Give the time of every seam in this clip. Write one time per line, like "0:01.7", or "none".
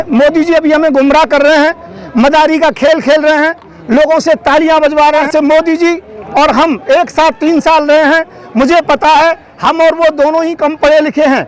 0:05.3